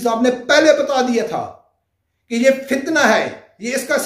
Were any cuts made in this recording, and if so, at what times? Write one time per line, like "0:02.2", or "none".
none